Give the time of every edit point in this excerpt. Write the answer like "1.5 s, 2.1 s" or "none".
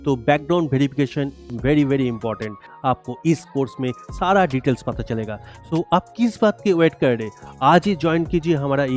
2.6 s

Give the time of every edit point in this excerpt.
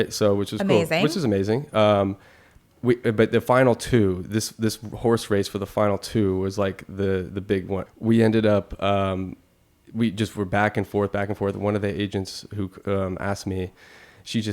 7.8 s

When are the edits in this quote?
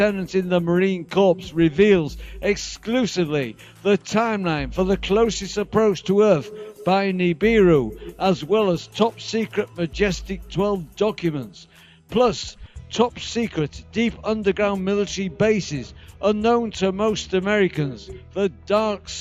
none

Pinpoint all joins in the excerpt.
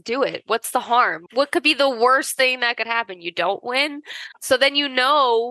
none

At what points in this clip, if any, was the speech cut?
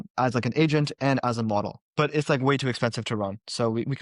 1.8 s

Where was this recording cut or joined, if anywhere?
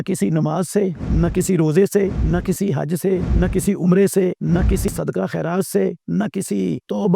1.0 s, 2.2 s, 3.3 s, 4.9 s, 6.4 s

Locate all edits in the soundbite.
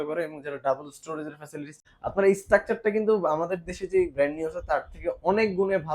1.8 s

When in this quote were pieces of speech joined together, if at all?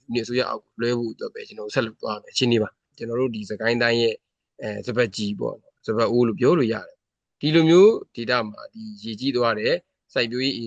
2.9 s

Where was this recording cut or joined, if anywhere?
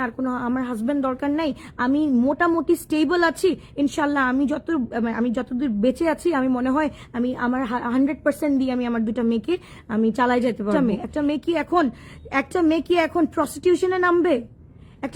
10.7 s

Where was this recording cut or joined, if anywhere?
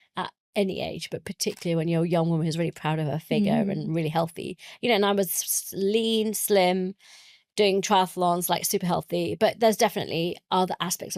none

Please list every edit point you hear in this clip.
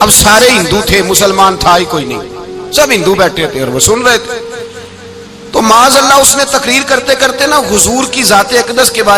none

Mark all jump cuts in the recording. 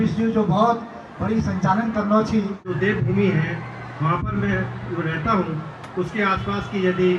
2.7 s

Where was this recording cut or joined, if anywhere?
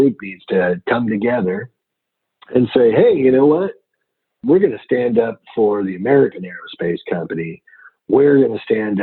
none

